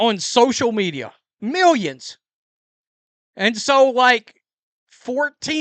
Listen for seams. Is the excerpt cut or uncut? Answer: cut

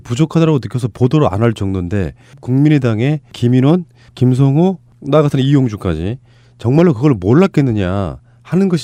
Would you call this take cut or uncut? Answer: uncut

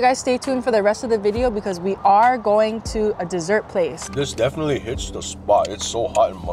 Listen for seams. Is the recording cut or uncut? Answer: cut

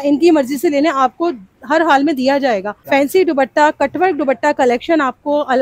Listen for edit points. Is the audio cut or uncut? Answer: cut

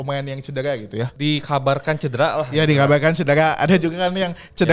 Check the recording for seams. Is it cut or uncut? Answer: cut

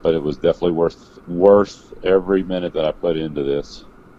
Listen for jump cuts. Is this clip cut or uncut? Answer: uncut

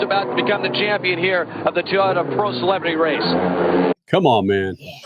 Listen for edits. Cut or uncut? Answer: cut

